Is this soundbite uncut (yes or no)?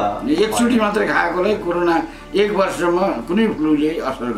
yes